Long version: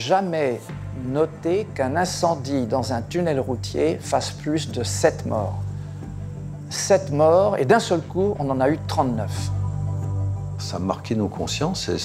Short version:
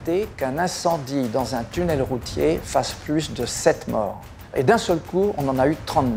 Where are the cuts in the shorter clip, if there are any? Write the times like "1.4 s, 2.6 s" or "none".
4.5 s